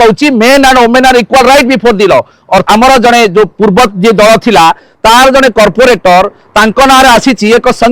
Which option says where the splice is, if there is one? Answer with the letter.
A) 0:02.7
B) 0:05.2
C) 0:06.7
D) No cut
A